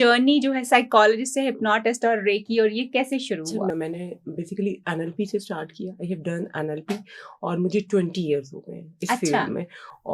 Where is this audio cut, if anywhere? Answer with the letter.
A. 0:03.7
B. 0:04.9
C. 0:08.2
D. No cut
A